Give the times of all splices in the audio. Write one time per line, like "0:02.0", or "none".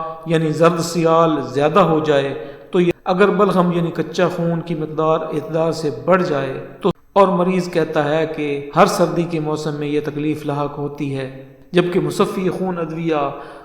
0:02.9
0:07.0